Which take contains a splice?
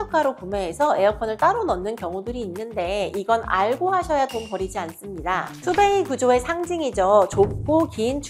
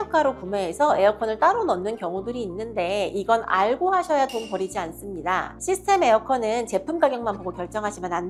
first; 1 cut; at 5.5 s

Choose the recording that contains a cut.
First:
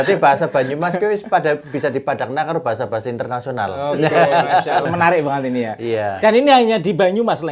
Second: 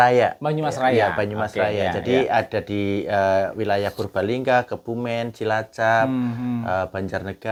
first; 1 cut; at 4.9 s

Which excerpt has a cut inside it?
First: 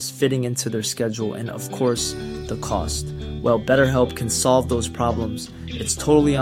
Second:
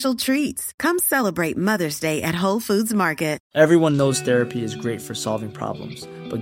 second; 1 cut; at 3.4 s

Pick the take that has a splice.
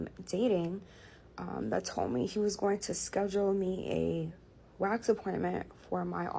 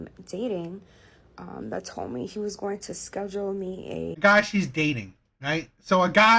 first; 1 cut; at 4.2 s

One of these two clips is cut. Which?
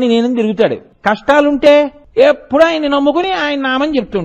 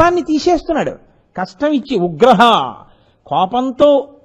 first; 2 cuts; at 0.9 s, 2.0 s

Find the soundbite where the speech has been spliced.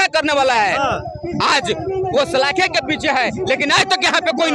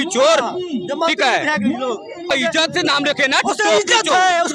second; 1 cut; at 2.3 s

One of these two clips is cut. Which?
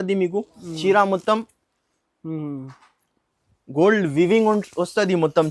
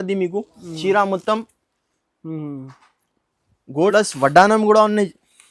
second; 1 cut; at 3.9 s

